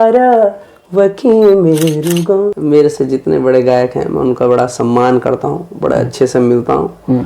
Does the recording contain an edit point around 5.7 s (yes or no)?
no